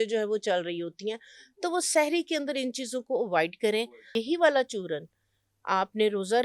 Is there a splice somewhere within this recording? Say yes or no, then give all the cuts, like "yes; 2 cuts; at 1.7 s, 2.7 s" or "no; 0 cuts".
yes; 1 cut; at 3.8 s